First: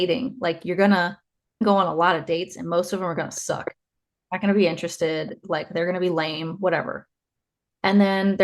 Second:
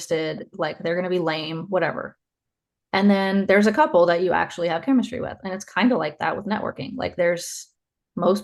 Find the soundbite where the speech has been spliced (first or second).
first